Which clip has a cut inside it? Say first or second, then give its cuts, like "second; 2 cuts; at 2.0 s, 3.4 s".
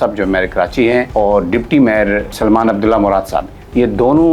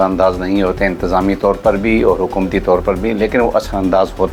first; 2 cuts; at 1.1 s, 2.4 s